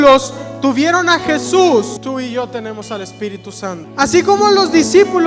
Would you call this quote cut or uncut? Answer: cut